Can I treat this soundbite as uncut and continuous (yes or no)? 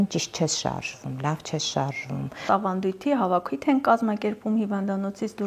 no